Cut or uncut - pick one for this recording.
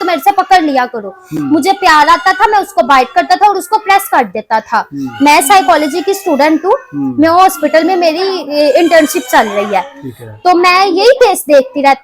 uncut